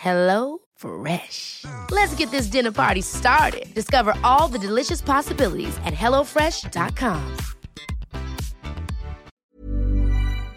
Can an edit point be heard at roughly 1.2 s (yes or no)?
no